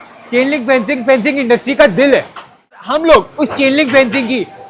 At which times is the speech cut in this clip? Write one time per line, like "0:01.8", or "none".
0:02.7